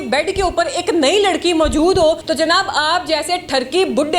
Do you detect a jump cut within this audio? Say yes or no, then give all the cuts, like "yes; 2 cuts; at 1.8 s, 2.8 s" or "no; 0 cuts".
yes; 1 cut; at 2.2 s